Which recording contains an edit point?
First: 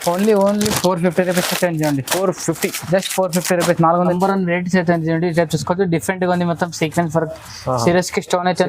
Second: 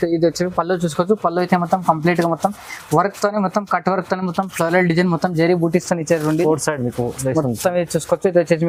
first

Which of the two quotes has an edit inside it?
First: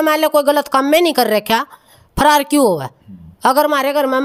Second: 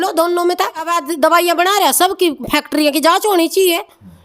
second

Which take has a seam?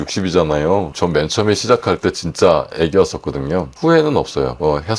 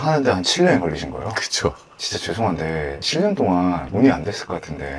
first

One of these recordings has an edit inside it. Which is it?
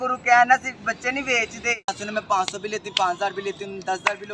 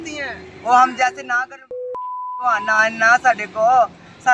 first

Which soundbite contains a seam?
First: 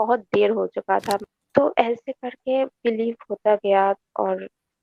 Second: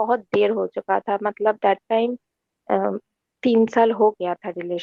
first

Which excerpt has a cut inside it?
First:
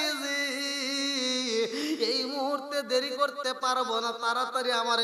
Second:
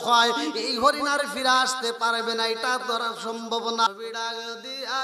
second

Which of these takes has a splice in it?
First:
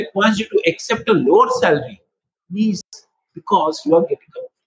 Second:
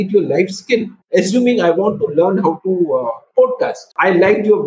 second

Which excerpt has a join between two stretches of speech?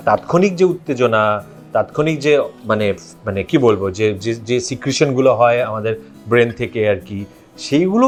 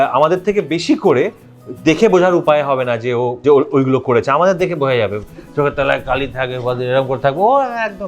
second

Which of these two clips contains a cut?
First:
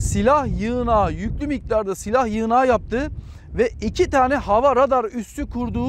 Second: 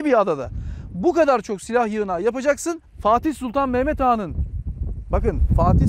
second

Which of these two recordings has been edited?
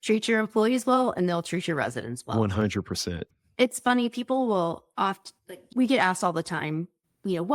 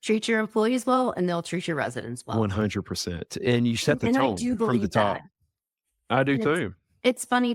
first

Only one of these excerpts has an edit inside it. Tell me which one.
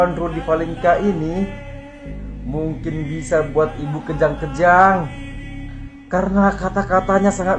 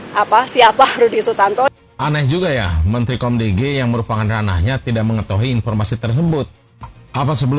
second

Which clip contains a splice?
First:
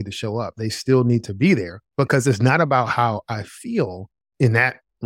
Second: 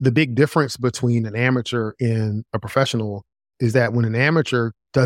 first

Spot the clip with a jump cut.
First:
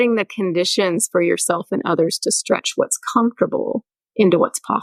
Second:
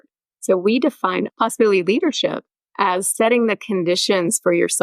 second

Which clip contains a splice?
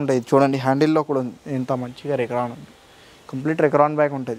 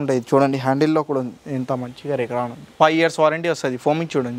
second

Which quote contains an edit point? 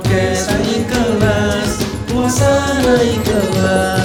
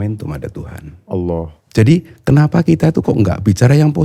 second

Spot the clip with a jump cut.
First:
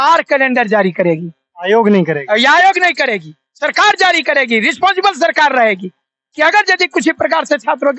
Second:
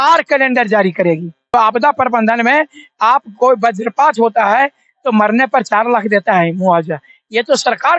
second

